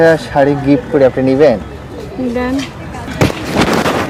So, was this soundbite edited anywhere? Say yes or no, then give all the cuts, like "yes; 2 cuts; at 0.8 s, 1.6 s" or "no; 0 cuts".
no; 0 cuts